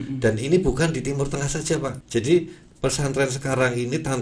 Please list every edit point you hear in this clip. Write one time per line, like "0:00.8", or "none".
0:02.0